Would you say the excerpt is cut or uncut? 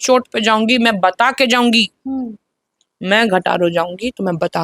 uncut